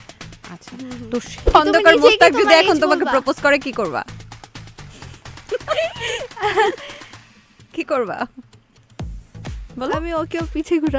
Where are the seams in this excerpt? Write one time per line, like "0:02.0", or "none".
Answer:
0:01.5